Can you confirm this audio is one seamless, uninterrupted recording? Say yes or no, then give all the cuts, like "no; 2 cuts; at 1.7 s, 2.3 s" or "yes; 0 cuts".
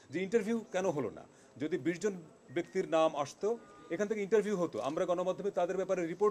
yes; 0 cuts